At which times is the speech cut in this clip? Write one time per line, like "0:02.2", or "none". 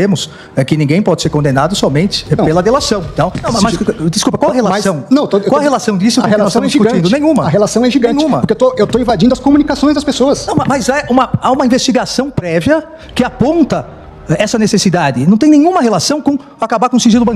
0:03.3